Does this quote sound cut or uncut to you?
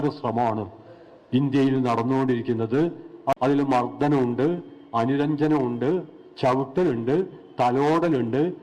cut